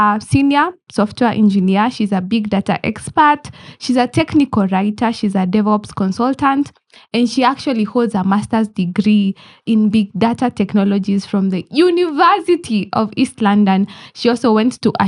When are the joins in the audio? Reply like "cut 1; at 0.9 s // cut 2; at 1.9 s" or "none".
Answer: none